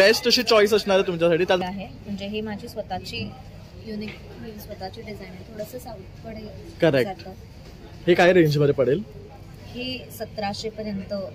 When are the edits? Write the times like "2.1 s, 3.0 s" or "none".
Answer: 1.6 s